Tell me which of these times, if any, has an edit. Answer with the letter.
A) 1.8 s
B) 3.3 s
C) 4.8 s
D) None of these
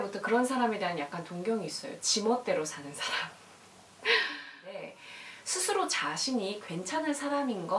C